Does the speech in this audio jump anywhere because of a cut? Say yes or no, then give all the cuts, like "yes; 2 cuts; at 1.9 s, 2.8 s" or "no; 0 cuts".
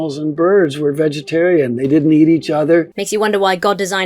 yes; 1 cut; at 3.0 s